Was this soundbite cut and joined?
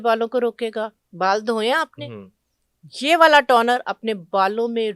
yes; 1 cut; at 1.0 s

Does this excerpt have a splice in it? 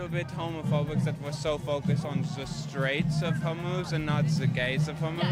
no; 0 cuts

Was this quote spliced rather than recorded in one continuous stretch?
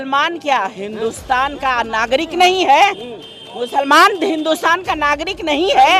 no; 0 cuts

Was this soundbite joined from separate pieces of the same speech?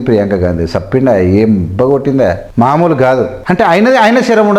yes; 2 cuts; at 2.4 s, 3.4 s

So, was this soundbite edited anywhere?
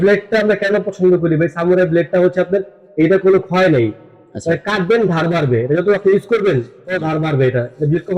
no; 0 cuts

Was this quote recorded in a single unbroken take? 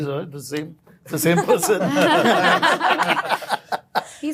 yes; 0 cuts

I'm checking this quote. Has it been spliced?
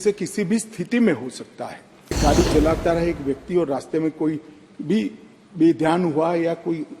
yes; 1 cut; at 2.2 s

